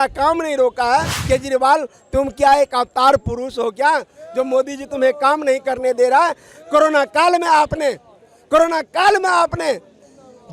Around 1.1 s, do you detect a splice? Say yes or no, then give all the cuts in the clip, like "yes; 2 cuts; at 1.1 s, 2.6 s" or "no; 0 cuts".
yes; 1 cut; at 1.1 s